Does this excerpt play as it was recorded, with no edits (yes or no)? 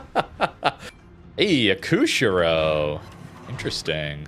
no